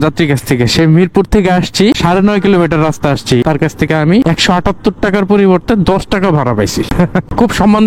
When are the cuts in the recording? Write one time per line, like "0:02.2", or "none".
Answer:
0:03.4